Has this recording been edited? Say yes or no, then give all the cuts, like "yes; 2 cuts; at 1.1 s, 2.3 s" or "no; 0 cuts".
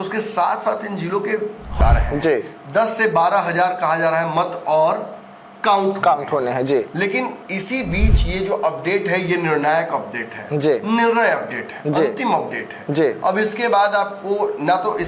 yes; 1 cut; at 1.7 s